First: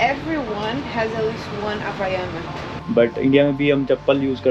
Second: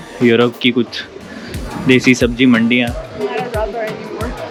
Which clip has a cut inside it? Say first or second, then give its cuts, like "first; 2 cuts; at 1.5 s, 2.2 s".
first; 1 cut; at 2.7 s